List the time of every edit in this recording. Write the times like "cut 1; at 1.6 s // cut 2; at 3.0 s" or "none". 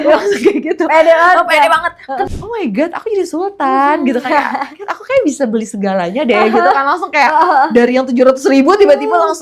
cut 1; at 2.3 s